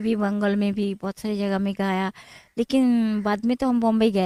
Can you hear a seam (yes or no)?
no